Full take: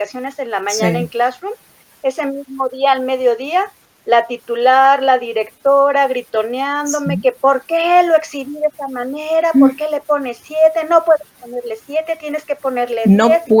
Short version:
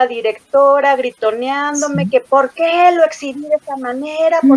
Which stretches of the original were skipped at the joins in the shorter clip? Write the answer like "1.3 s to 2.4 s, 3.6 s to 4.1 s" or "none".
none